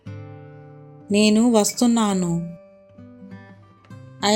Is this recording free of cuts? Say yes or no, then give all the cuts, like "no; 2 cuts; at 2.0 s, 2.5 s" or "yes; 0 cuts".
yes; 0 cuts